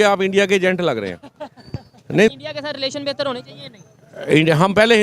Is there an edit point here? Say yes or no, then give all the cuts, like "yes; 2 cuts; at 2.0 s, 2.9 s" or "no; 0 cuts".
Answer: yes; 1 cut; at 2.3 s